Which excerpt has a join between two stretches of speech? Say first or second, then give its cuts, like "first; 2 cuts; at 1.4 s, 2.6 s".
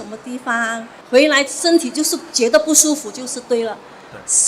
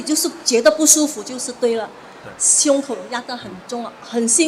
first; 1 cut; at 0.9 s